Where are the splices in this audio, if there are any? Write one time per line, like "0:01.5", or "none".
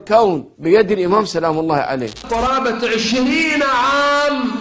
0:02.2